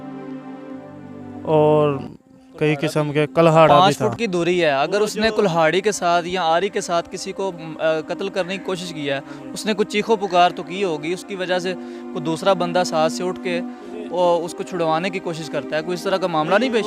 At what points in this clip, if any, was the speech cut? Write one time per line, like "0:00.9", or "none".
0:03.7

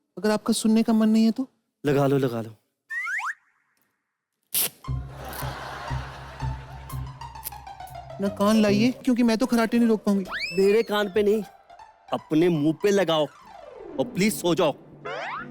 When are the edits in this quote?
none

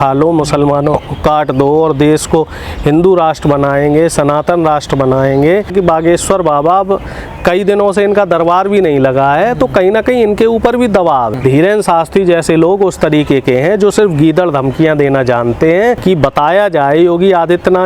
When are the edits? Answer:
0:05.7
0:11.3
0:16.0

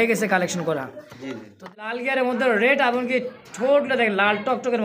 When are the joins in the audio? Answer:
0:01.7

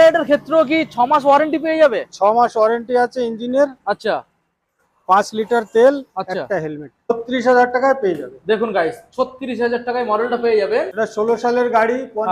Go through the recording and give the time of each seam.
0:07.1
0:10.9

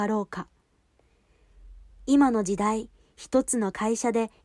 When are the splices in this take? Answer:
0:01.1

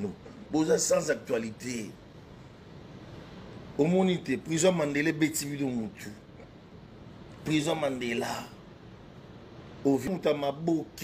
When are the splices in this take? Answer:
0:10.1

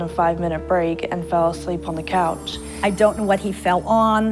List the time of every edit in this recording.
none

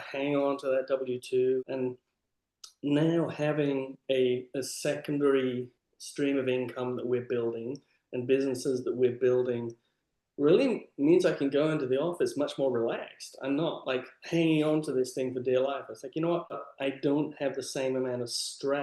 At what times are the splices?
0:01.6
0:16.6

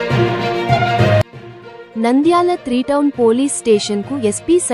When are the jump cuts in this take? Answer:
0:01.3

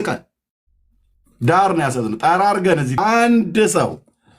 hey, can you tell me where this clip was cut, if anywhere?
0:03.0

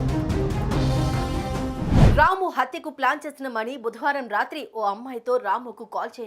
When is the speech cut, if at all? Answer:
0:01.7

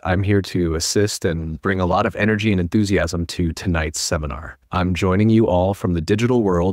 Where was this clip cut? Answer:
none

